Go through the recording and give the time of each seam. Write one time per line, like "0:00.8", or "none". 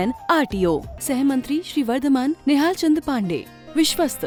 none